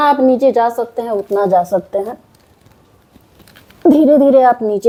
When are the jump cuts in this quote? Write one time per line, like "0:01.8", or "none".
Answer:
none